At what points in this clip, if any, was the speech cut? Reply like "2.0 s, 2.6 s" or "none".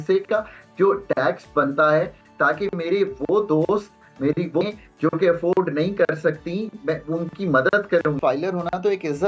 8.2 s